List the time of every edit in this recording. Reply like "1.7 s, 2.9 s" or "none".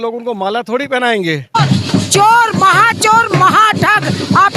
1.5 s

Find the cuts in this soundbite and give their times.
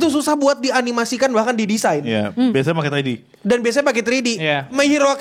none

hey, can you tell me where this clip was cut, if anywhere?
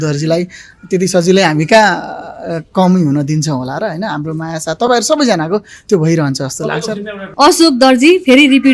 7.2 s

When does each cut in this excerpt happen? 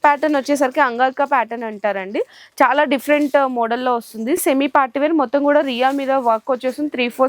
4.4 s

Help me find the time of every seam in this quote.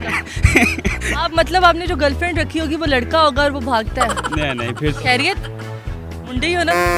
none

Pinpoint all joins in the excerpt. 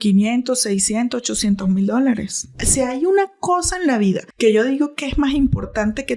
2.6 s, 4.3 s

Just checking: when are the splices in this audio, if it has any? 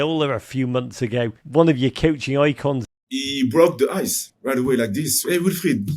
1.4 s, 2.8 s, 4.3 s, 5.1 s

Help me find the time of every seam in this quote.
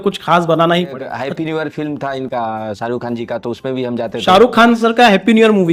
1.0 s

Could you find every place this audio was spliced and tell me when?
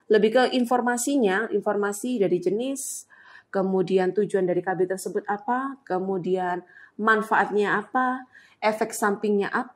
none

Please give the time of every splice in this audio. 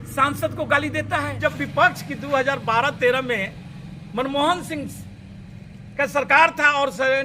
1.4 s

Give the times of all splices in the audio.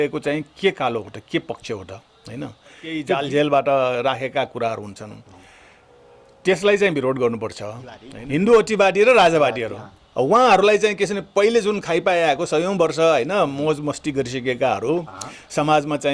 3.0 s, 8.1 s

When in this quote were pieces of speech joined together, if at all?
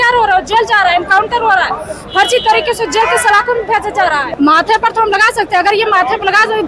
4.2 s

